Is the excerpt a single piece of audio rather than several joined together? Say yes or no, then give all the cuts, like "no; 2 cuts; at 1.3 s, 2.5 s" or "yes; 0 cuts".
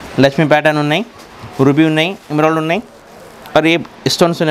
yes; 0 cuts